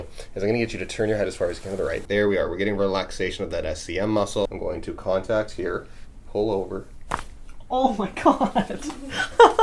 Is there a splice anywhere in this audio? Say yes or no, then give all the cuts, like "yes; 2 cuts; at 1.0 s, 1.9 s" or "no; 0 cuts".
yes; 2 cuts; at 2.0 s, 4.5 s